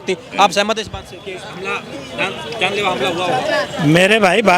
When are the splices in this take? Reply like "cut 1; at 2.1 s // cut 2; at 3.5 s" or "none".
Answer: none